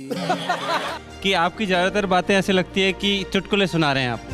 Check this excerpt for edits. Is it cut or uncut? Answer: cut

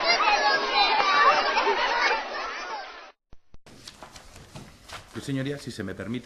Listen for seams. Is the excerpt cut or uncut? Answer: uncut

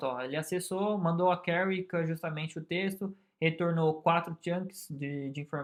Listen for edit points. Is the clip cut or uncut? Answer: uncut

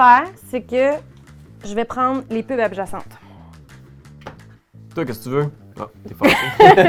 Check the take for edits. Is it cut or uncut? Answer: uncut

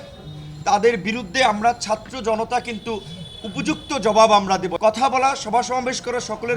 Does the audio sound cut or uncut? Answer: cut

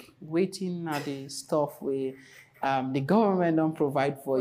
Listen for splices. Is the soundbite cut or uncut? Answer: uncut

